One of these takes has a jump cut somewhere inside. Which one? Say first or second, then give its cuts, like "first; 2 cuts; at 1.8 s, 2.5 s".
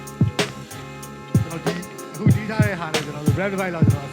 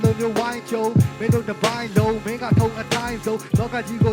first; 1 cut; at 1.2 s